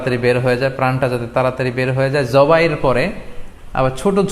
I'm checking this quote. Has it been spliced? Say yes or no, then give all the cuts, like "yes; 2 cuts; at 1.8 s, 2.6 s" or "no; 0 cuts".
no; 0 cuts